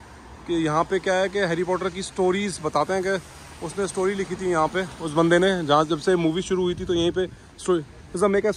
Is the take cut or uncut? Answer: uncut